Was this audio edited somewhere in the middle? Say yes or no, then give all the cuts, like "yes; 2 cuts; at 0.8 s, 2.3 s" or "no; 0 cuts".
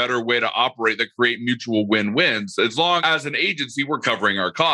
yes; 1 cut; at 3.0 s